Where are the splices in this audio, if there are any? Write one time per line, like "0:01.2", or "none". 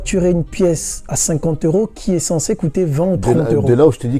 none